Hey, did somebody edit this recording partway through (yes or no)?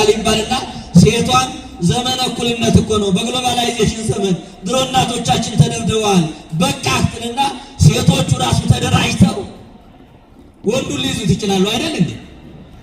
no